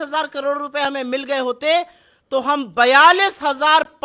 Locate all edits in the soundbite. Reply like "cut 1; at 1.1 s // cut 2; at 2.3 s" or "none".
none